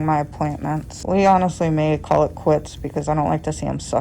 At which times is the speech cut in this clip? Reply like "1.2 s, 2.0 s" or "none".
0.9 s